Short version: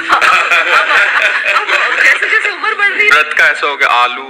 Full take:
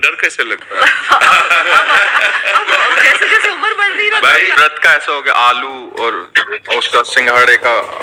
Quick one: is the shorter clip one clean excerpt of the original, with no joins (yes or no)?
no